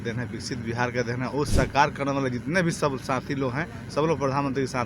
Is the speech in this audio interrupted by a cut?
yes; 1 cut; at 1.5 s

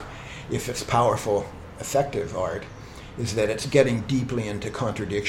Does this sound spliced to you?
yes; 1 cut; at 3.6 s

